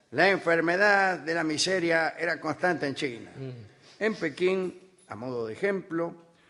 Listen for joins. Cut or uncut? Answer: cut